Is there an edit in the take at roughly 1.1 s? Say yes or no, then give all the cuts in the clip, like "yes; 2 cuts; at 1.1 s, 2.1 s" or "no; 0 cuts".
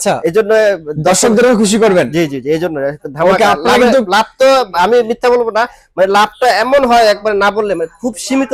no; 0 cuts